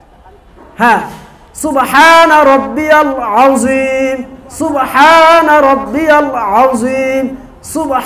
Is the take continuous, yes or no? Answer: yes